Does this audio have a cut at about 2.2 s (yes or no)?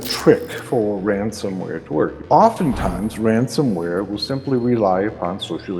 yes